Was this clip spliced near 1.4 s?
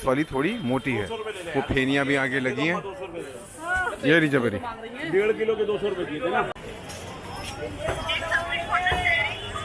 no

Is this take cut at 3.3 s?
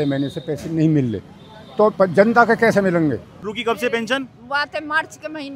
yes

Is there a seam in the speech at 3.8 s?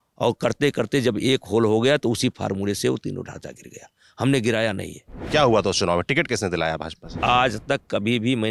no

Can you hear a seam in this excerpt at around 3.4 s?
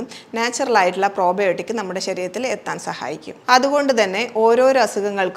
no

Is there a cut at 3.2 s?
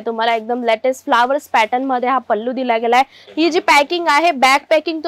yes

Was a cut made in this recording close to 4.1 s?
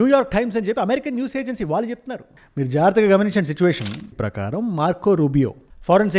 yes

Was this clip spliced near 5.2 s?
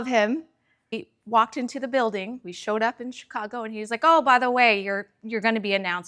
no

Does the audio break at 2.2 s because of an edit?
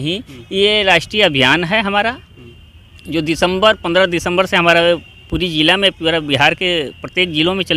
no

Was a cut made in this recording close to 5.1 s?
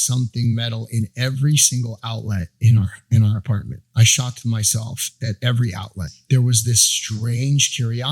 yes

